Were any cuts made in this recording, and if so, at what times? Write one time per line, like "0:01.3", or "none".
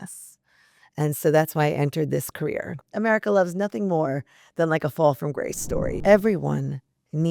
0:02.9
0:05.9